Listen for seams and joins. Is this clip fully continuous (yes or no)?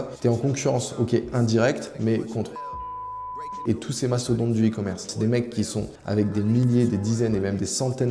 no